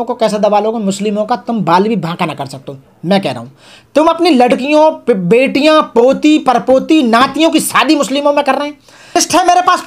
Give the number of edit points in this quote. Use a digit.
0